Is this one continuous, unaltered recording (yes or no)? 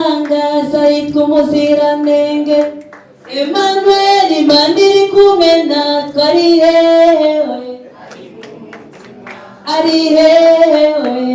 yes